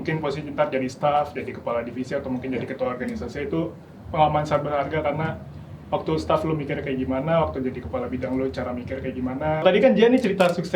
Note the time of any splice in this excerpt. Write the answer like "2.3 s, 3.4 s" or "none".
9.6 s